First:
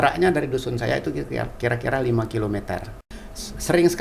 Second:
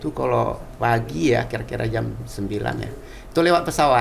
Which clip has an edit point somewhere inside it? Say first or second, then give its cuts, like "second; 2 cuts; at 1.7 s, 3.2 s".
first; 1 cut; at 2.9 s